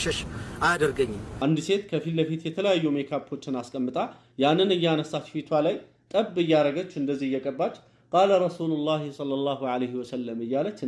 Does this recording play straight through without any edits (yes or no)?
no